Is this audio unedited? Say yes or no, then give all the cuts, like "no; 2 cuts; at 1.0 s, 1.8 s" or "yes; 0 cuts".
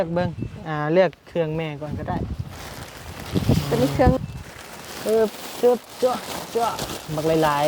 no; 1 cut; at 4.2 s